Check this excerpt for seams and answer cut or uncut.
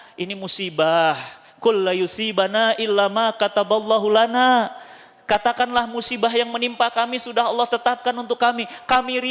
uncut